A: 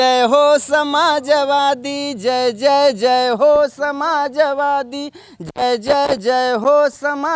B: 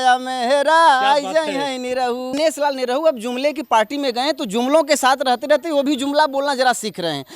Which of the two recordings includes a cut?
B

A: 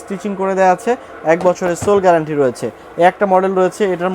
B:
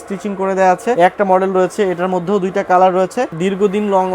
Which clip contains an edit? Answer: B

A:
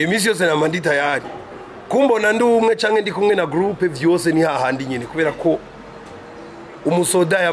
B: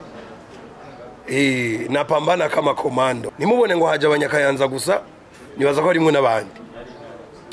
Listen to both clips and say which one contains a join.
B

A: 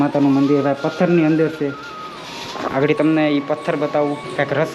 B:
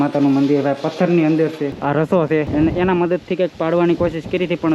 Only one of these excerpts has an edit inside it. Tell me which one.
B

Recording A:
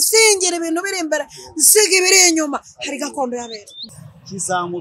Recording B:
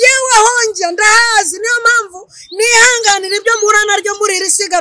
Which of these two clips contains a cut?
A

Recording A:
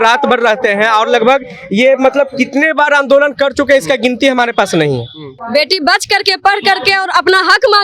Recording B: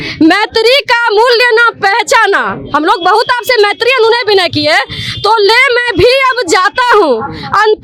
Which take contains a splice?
A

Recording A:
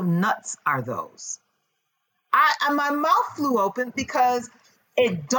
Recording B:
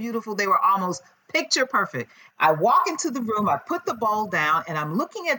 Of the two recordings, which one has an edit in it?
B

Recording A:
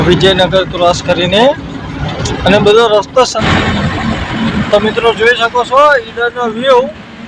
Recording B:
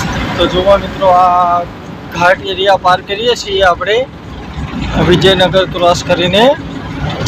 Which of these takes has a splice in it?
A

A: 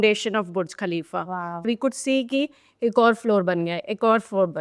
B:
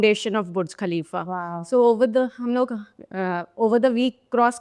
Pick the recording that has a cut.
A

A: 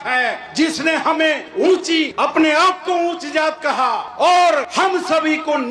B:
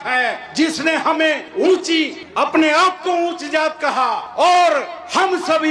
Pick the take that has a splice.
A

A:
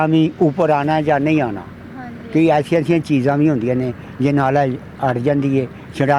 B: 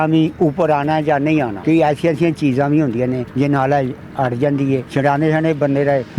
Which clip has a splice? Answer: B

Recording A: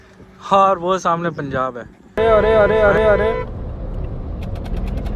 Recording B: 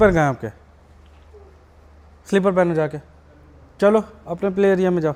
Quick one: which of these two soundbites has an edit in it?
A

